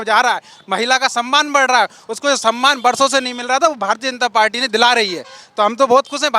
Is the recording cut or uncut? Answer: uncut